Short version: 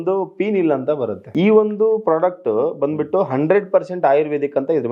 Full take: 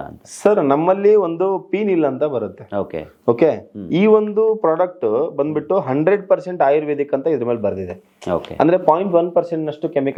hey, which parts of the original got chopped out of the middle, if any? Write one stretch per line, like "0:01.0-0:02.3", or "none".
0:02.5-0:03.8